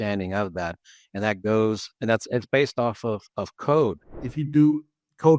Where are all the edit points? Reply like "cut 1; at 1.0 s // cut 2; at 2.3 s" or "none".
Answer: cut 1; at 4.1 s